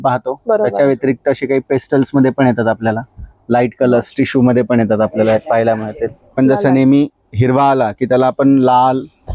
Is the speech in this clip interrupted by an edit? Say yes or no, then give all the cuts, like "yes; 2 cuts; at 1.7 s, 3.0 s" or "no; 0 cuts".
yes; 1 cut; at 6.3 s